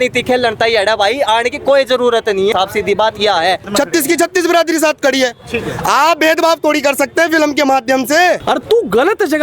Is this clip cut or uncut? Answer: cut